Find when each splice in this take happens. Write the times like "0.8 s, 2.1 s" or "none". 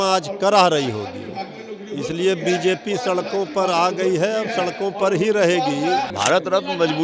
6.1 s